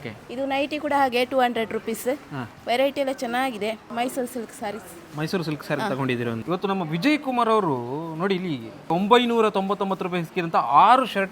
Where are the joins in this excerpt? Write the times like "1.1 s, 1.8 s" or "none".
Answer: 3.9 s, 6.4 s, 8.9 s